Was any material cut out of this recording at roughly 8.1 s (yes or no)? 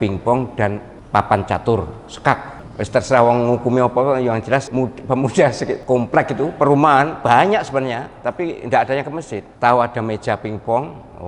no